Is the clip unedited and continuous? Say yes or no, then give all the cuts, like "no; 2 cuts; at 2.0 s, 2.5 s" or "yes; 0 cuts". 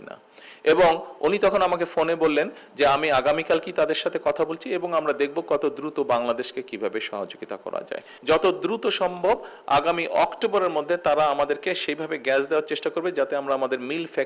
no; 1 cut; at 8.1 s